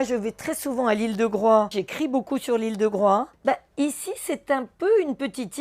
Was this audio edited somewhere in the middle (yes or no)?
yes